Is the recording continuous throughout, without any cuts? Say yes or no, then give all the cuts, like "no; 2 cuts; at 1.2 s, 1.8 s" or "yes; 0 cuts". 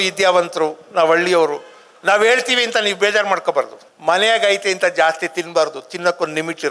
no; 1 cut; at 3.8 s